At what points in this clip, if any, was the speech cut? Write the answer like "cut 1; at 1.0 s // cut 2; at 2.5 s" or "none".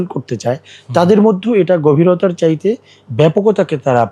none